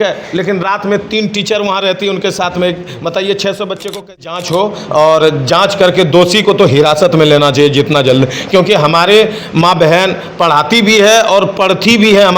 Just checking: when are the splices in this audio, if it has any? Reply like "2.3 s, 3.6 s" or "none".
4.3 s